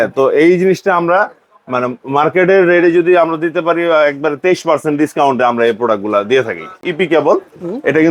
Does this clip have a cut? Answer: yes; 1 cut; at 6.8 s

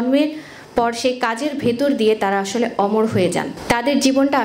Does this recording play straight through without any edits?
no; 1 cut; at 3.5 s

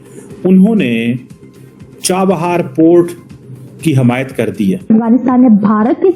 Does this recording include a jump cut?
yes; 1 cut; at 4.9 s

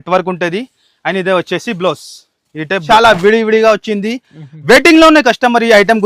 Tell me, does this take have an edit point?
yes; 1 cut; at 2.8 s

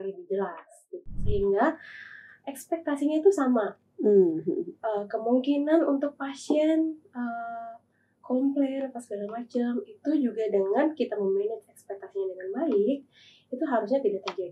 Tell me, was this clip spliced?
yes; 1 cut; at 1.0 s

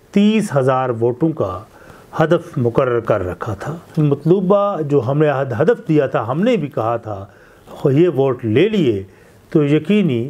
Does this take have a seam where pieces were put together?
yes; 1 cut; at 3.9 s

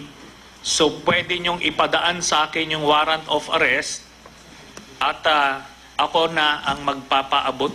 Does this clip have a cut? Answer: yes; 1 cut; at 2.6 s

